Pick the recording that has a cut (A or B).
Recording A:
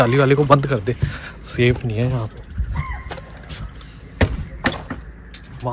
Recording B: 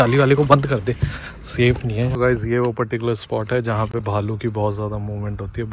B